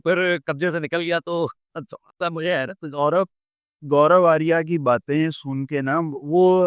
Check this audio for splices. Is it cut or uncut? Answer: uncut